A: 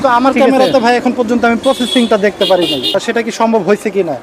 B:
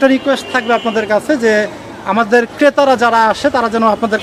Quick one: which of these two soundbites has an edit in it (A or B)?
A